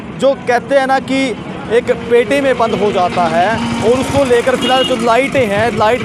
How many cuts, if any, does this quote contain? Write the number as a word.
zero